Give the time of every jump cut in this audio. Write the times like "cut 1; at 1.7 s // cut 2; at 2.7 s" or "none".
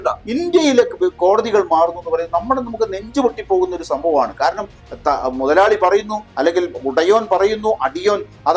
cut 1; at 4.8 s